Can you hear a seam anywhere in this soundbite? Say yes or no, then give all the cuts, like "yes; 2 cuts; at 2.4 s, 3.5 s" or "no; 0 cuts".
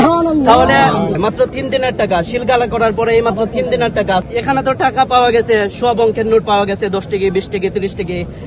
yes; 2 cuts; at 1.1 s, 4.3 s